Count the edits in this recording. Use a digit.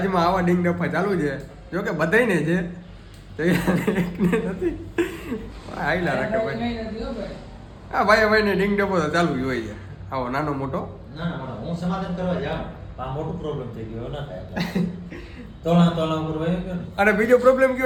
0